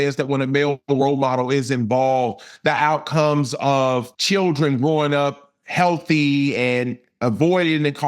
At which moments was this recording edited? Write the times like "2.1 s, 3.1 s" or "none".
4.1 s